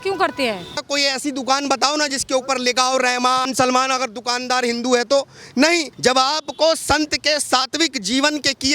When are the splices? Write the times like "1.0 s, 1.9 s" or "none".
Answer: 0.8 s, 3.5 s, 5.9 s